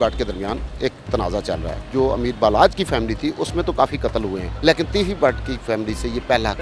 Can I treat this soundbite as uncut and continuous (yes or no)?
no